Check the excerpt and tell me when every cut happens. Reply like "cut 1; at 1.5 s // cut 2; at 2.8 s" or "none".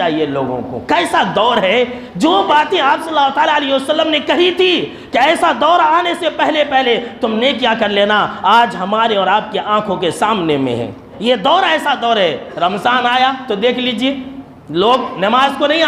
cut 1; at 11.1 s

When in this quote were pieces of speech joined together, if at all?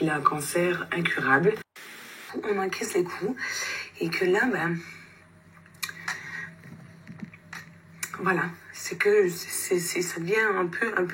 cut 1; at 1.7 s

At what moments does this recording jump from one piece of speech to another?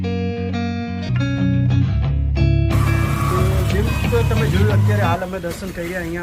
cut 1; at 1.1 s

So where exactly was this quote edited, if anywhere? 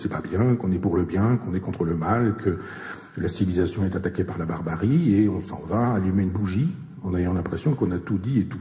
cut 1; at 4.1 s

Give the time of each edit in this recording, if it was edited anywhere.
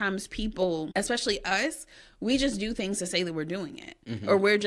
cut 1; at 0.9 s

